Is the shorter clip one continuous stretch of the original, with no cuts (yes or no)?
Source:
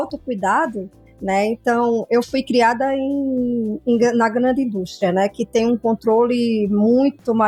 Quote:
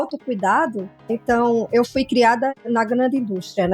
no